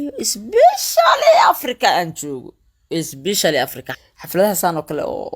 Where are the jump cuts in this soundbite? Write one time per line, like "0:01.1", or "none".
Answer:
0:03.9

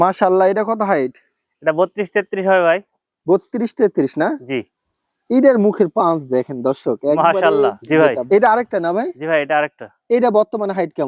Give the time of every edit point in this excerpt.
0:07.8

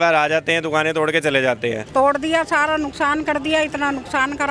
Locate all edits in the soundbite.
0:01.9

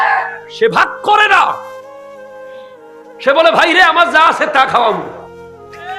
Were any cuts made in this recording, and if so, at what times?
0:01.7
0:02.9

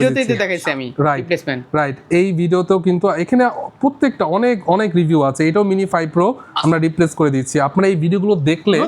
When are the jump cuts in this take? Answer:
none

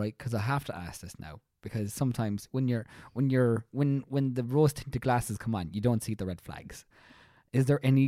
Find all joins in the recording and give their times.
none

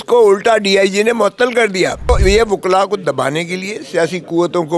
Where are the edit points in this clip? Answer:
0:02.1

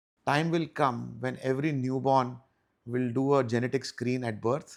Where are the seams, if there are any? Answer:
none

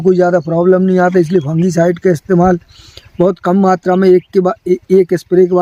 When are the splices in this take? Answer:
none

